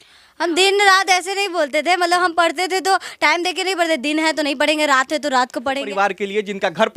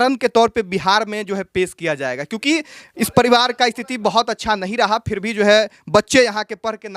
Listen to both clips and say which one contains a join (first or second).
first